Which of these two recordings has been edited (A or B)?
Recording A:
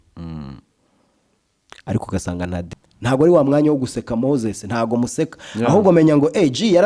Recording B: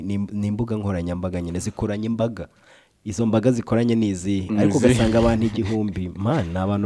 A